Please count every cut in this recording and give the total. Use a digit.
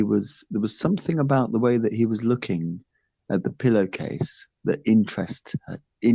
0